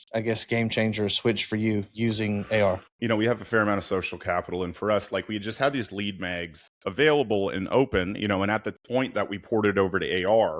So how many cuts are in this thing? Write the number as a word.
one